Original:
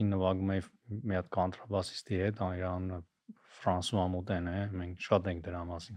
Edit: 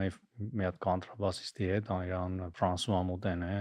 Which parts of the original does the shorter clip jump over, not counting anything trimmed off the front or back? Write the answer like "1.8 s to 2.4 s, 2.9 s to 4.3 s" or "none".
3.0 s to 3.5 s